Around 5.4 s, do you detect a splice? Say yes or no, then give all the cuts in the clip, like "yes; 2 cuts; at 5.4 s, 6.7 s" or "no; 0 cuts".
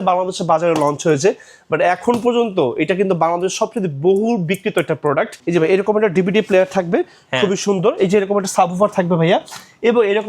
yes; 1 cut; at 5.4 s